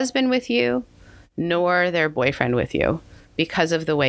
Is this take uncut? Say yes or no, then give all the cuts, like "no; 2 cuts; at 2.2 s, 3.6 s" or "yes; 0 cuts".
yes; 0 cuts